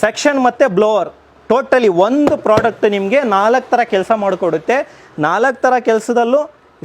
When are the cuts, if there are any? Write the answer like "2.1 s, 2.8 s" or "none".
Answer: none